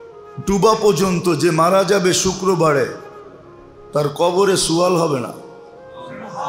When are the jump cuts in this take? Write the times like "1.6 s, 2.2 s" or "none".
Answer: none